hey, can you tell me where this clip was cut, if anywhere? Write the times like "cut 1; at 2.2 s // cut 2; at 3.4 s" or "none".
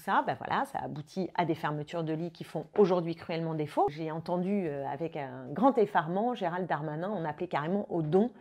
cut 1; at 3.9 s